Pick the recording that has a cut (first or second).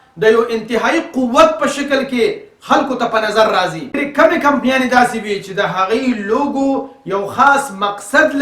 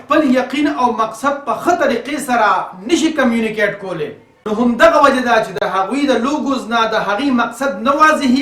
first